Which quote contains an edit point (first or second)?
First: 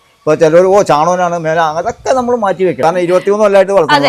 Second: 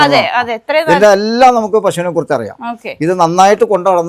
first